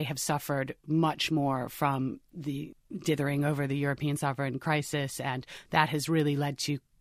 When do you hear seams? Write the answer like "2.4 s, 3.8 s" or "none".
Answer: none